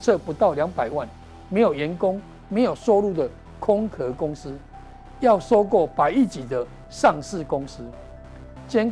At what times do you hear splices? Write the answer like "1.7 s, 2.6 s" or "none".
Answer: none